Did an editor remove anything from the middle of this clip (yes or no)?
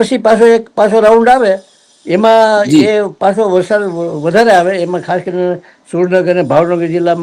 no